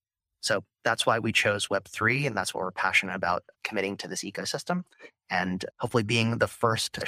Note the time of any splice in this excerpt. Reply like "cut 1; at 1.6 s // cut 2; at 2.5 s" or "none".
cut 1; at 3.5 s